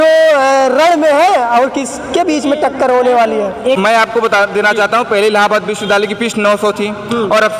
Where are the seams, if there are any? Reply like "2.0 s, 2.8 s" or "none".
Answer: 3.8 s